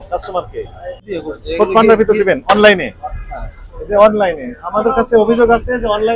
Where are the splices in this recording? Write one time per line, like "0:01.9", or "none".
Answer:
0:01.1